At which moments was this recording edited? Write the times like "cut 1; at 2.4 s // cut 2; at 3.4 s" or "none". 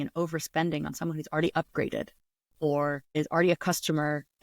cut 1; at 3.1 s